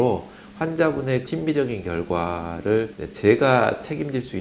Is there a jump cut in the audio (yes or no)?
yes